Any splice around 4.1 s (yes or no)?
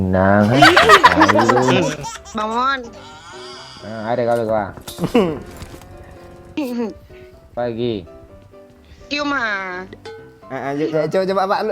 no